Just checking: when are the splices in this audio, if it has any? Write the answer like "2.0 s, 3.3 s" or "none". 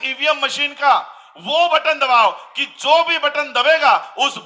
none